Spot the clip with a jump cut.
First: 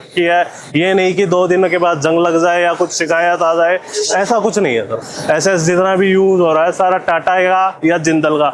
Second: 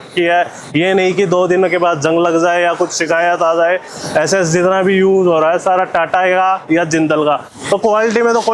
second; 2 cuts; at 3.9 s, 7.5 s

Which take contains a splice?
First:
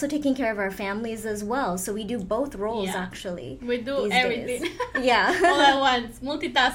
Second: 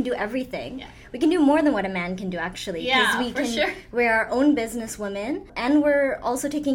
second; 1 cut; at 5.5 s

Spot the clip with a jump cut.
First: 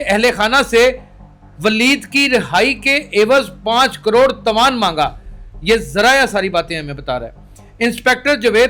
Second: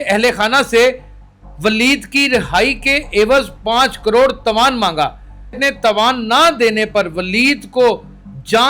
second; 1 cut; at 5.6 s

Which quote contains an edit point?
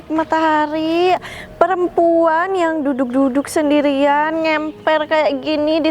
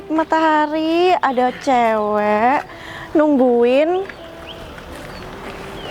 first; 1 cut; at 1.2 s

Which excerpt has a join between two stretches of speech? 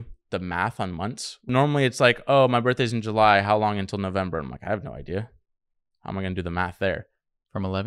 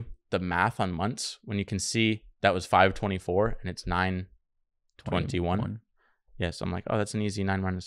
first; 1 cut; at 1.5 s

